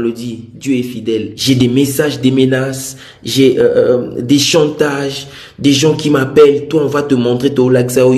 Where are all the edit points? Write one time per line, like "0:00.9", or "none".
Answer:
0:01.3